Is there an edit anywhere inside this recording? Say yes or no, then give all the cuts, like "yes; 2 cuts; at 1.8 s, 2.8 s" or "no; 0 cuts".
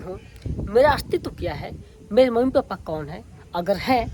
no; 0 cuts